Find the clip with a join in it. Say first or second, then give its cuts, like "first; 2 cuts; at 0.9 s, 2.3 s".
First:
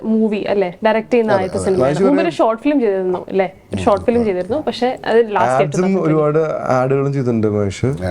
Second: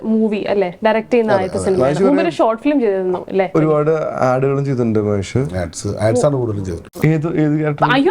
second; 2 cuts; at 3.5 s, 6.8 s